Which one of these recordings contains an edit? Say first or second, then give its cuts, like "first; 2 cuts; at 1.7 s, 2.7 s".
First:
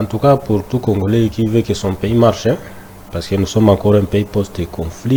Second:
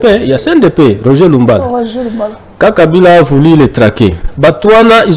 second; 1 cut; at 4.3 s